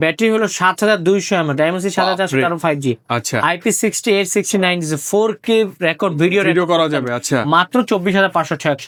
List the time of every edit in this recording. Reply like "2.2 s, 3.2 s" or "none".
none